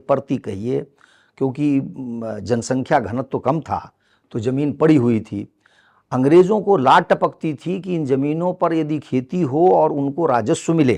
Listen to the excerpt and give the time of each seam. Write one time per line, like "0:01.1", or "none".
none